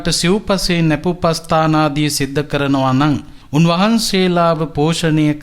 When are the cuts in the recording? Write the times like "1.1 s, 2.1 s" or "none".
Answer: 3.3 s